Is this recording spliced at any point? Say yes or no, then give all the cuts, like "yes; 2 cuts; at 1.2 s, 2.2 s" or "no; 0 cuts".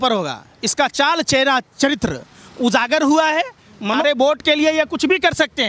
yes; 1 cut; at 3.8 s